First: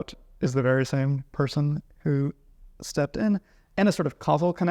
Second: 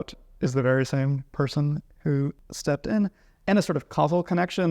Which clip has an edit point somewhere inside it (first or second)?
second